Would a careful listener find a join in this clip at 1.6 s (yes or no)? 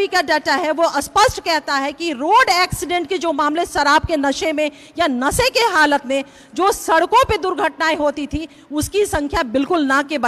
no